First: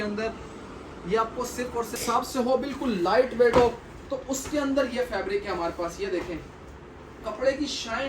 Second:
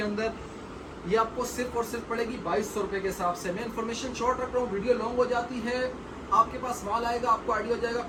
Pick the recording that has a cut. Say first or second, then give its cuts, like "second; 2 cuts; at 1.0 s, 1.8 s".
first; 1 cut; at 2.0 s